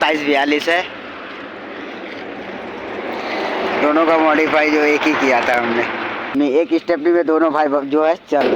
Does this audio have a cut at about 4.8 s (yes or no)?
no